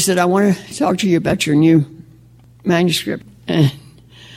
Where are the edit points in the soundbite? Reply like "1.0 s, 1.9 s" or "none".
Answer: none